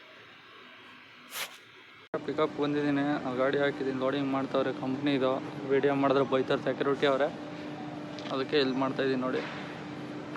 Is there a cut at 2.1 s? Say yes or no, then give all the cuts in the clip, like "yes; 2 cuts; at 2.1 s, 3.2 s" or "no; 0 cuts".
yes; 1 cut; at 2.1 s